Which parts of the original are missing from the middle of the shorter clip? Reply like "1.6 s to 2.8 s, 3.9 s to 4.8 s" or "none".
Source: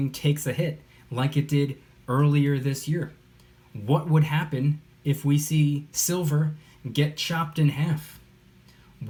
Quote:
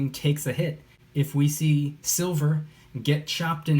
1.0 s to 4.9 s